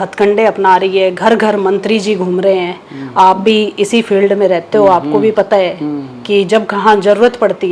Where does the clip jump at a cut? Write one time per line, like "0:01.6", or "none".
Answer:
none